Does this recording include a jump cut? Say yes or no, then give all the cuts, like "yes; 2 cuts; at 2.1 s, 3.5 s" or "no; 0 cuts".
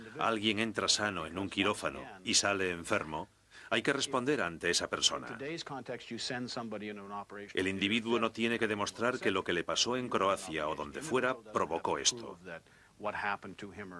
no; 0 cuts